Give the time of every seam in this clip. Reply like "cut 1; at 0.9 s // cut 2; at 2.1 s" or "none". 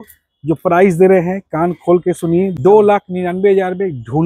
cut 1; at 2.5 s